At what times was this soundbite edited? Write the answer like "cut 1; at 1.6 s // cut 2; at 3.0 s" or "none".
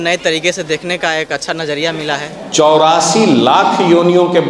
cut 1; at 2.4 s